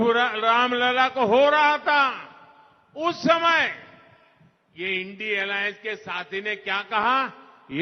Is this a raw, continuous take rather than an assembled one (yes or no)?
yes